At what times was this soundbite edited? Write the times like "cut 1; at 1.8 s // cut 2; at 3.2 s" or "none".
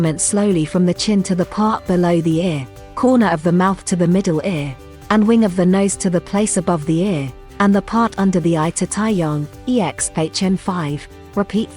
none